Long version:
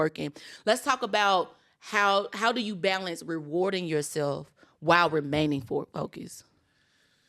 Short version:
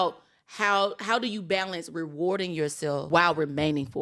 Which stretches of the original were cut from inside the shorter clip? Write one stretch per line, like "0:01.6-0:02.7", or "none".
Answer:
0:04.4-0:04.8

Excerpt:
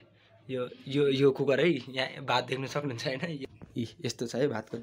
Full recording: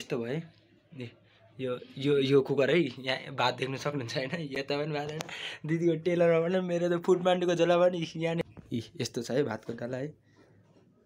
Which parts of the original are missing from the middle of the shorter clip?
0:04.6-0:08.4

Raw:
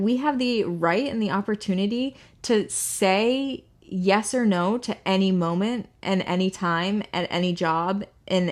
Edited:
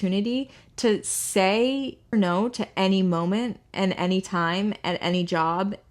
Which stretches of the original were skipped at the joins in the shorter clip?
0:03.8-0:04.4

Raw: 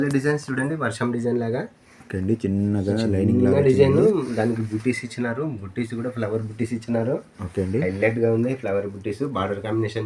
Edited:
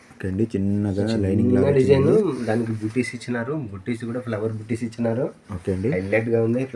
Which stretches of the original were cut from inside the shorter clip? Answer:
none

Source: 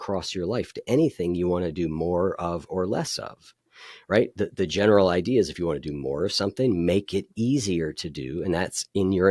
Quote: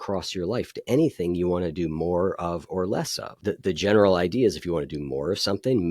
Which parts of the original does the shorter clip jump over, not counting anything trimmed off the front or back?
0:03.4-0:04.3

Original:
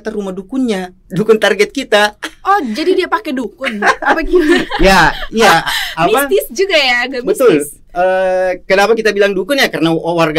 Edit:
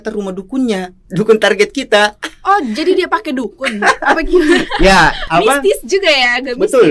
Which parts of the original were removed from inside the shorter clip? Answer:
0:05.2-0:05.9

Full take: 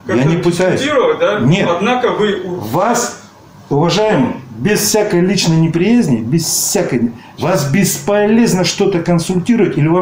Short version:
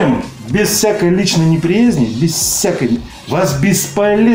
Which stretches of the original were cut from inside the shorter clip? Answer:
none

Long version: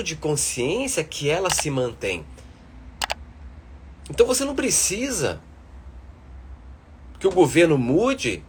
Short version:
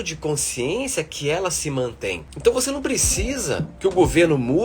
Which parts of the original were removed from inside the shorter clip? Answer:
0:02.3-0:04.0
0:05.4-0:07.1

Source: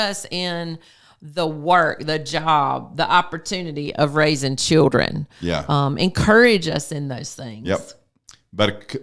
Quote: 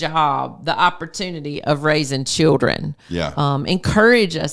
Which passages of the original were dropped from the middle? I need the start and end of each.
none

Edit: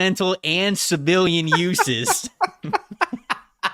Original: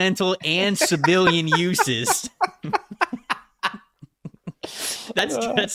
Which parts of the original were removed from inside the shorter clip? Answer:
none

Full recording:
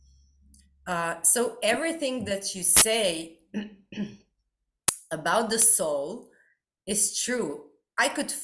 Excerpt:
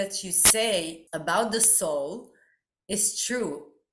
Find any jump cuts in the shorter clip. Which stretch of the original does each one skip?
0:03.3-0:05.0

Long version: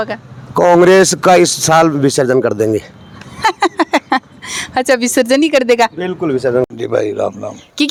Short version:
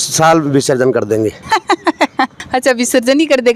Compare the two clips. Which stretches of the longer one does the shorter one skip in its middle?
0:02.9-0:03.3
0:04.3-0:04.6

